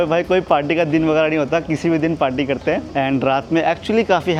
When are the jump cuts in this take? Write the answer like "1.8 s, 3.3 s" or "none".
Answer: none